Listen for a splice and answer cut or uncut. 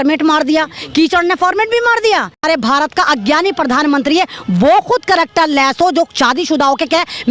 cut